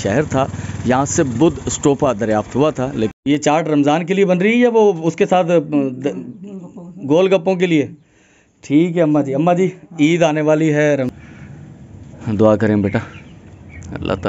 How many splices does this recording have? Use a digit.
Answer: 2